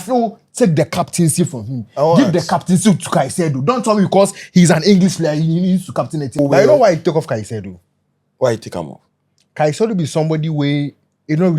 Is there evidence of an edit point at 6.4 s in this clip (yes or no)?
yes